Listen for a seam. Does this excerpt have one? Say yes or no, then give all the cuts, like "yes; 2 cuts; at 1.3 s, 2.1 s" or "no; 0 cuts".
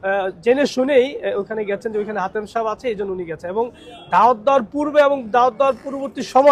no; 0 cuts